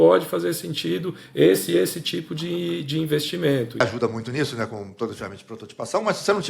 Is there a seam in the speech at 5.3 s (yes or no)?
no